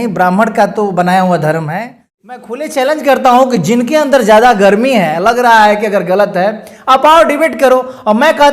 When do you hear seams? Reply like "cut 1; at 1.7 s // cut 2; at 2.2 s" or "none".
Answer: cut 1; at 2.4 s